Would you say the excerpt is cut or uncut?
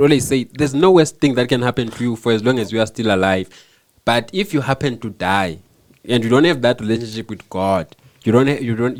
uncut